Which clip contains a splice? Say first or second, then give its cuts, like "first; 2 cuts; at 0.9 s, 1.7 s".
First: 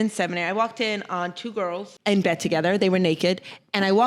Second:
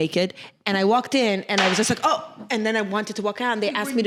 first; 1 cut; at 1.8 s